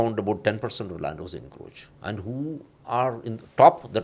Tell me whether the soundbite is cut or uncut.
uncut